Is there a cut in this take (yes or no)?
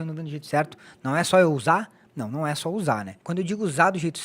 yes